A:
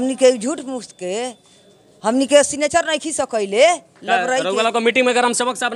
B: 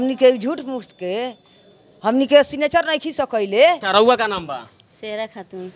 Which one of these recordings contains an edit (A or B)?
B